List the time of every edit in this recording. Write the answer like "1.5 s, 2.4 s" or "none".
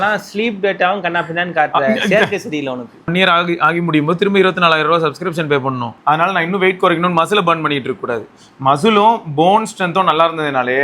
3.1 s, 5.9 s